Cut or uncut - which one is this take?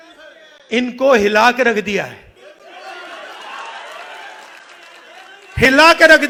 uncut